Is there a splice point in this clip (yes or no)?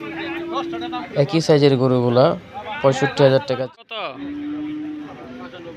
yes